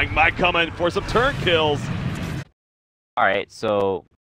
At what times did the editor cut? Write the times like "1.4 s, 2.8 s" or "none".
none